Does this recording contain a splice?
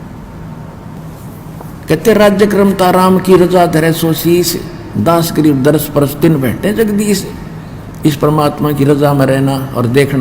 yes; 1 cut; at 1.0 s

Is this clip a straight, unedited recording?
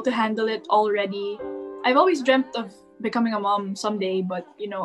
yes; 0 cuts

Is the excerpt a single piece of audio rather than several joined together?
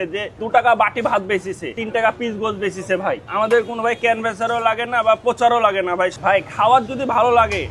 no; 3 cuts; at 1.8 s, 3.3 s, 6.1 s

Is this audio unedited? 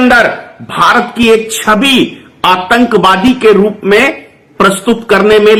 yes; 0 cuts

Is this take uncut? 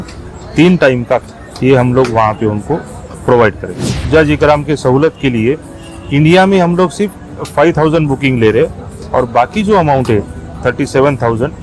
no; 2 cuts; at 1.2 s, 4.1 s

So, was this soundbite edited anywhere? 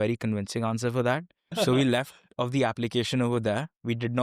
yes; 1 cut; at 1.6 s

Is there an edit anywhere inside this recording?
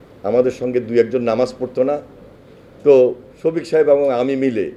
no; 0 cuts

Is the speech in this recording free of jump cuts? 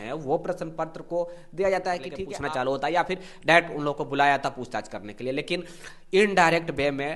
no; 1 cut; at 2.2 s

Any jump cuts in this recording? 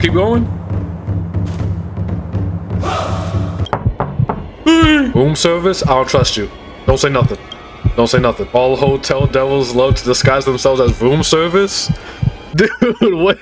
yes; 1 cut; at 3.6 s

